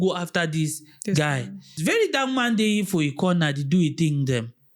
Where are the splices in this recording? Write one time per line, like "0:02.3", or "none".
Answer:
0:01.7